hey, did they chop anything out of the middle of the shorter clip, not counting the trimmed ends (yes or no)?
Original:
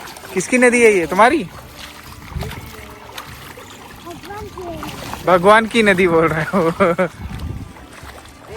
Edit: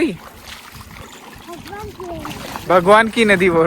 yes